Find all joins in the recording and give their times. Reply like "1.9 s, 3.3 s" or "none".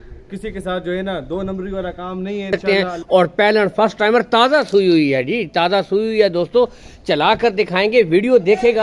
2.6 s